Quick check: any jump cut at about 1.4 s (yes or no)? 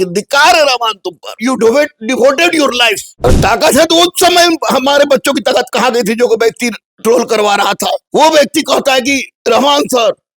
yes